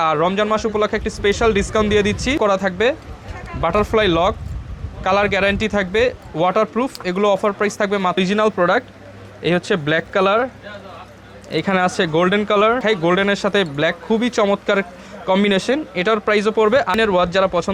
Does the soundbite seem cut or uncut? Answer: cut